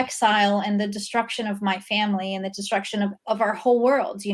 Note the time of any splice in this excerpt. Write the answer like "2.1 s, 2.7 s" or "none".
3.1 s